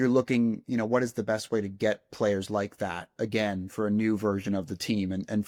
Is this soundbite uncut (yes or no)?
yes